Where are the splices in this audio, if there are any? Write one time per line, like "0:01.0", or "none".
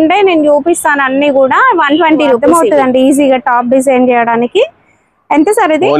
0:02.4